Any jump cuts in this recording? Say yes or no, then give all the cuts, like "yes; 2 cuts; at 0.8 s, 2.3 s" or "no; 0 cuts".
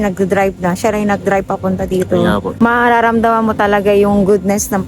yes; 1 cut; at 2.5 s